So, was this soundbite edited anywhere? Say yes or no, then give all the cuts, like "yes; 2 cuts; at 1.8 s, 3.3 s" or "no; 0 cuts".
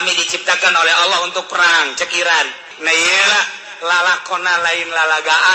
yes; 1 cut; at 2.7 s